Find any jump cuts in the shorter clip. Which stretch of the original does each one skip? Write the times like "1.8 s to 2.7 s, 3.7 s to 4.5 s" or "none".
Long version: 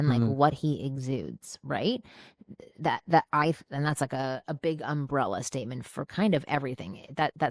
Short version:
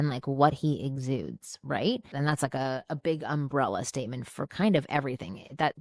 2.1 s to 3.7 s